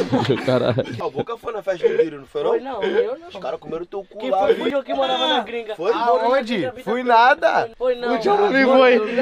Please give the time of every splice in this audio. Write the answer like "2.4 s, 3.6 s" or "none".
1.0 s, 4.7 s, 7.7 s